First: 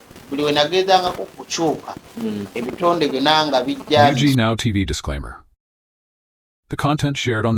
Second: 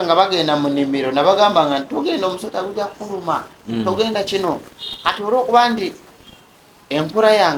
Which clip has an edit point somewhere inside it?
first; 1 cut; at 4.2 s

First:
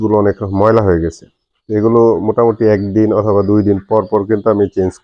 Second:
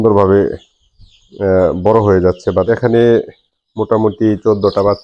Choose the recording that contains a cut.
second; 1 cut; at 2.7 s

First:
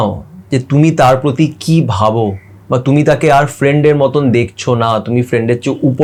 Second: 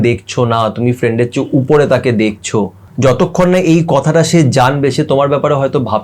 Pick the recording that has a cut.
second; 1 cut; at 2.8 s

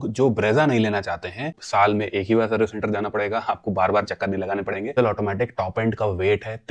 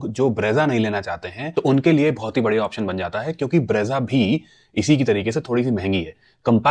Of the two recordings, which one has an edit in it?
first; 2 cuts; at 1.5 s, 5.0 s

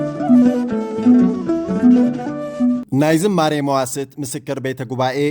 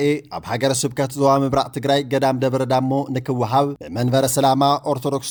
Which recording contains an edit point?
first; 1 cut; at 2.8 s

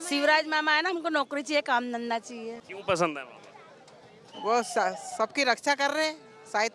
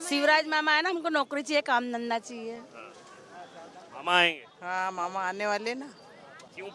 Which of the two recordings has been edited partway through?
first; 1 cut; at 2.7 s

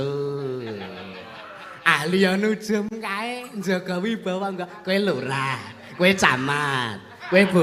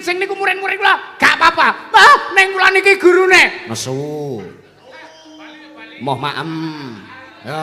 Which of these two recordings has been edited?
second; 1 cut; at 5.9 s

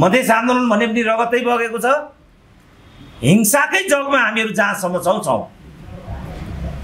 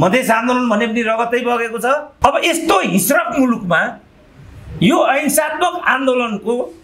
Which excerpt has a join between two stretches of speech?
second; 1 cut; at 2.1 s

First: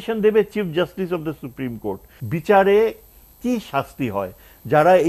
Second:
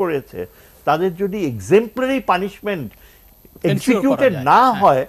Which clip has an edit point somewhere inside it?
first; 1 cut; at 2.1 s

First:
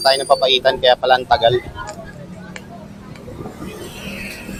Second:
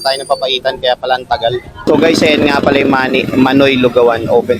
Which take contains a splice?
second; 1 cut; at 1.9 s

